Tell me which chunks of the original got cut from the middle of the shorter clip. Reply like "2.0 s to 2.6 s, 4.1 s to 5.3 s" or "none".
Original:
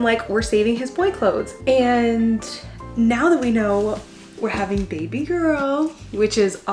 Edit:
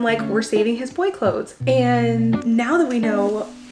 2.4 s to 2.9 s